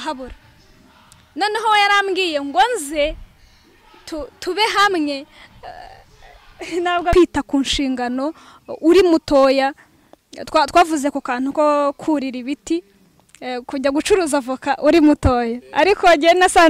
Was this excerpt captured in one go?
no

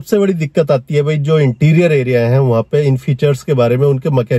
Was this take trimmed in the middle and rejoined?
no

